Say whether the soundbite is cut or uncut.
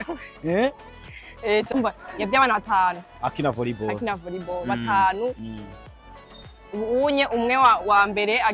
cut